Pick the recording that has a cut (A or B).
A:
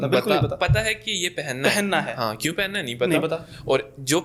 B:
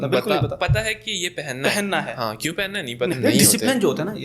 B